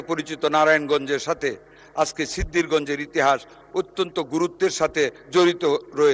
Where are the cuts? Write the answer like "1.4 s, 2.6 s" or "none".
5.2 s

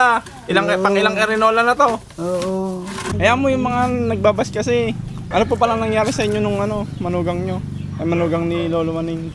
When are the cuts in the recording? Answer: 3.0 s, 5.1 s

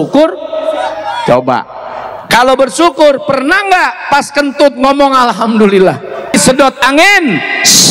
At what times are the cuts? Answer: 6.3 s

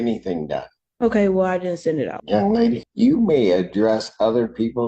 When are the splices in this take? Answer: 2.2 s, 2.9 s

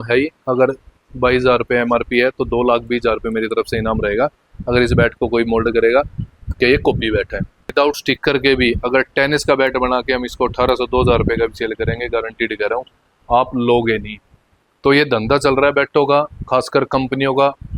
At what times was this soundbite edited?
7.7 s

